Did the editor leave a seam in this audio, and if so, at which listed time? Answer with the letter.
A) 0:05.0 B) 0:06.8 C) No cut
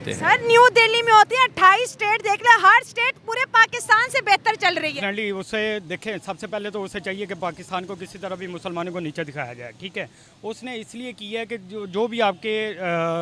A